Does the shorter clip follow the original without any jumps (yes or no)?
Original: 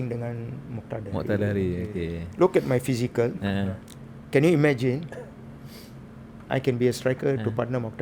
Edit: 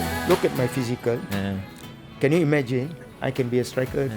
no